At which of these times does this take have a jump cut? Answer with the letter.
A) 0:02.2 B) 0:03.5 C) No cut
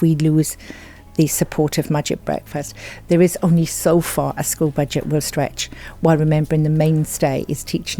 A